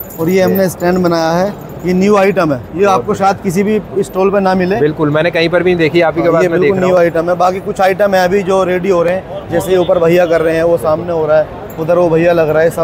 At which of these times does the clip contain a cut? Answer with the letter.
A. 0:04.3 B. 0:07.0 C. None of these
C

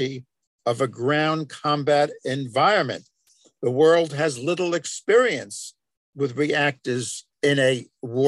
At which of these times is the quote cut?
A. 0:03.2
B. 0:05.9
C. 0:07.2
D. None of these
C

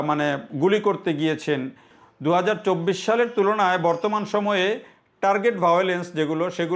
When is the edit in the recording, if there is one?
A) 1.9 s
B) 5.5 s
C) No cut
A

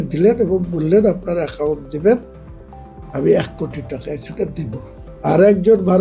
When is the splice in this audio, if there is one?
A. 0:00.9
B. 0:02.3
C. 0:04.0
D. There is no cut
D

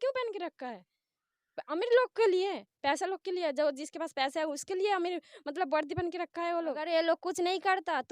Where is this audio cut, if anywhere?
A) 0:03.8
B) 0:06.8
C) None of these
B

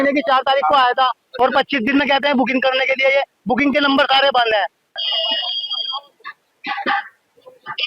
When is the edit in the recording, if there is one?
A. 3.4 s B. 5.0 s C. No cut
B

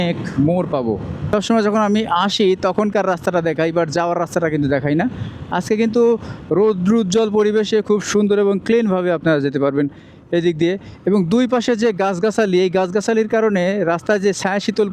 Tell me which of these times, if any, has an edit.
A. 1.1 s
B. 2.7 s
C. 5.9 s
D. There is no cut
A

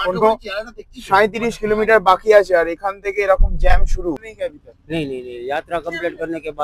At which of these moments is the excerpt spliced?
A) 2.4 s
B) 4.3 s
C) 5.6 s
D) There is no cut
B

